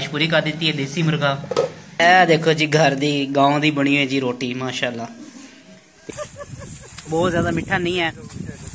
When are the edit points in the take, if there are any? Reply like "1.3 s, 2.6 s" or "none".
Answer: 1.9 s, 6.1 s